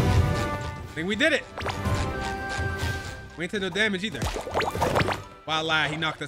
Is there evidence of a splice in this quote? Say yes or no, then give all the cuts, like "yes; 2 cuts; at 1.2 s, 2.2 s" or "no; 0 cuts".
no; 0 cuts